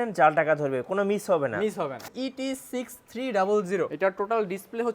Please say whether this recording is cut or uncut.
cut